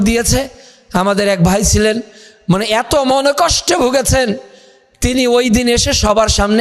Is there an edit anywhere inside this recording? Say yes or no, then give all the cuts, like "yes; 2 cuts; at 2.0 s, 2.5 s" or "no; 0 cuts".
no; 0 cuts